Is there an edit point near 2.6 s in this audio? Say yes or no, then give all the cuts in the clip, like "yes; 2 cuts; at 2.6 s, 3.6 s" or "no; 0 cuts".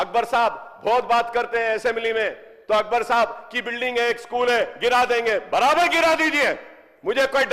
no; 0 cuts